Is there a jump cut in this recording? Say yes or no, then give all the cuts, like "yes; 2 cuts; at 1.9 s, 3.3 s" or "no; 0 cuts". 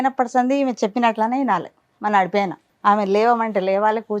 yes; 1 cut; at 2.6 s